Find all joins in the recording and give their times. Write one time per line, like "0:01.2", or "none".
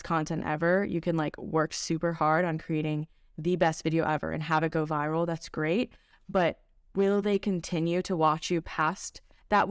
none